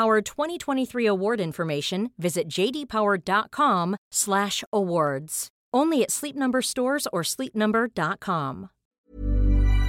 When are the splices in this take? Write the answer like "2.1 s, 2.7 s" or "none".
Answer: 8.9 s